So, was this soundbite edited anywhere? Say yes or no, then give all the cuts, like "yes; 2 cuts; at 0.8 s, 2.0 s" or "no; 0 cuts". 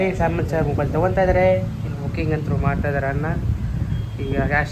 no; 0 cuts